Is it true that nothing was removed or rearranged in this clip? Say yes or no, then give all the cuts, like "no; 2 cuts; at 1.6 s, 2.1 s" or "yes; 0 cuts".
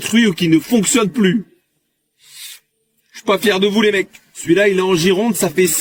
yes; 0 cuts